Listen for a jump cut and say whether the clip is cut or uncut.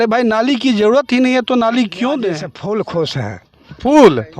cut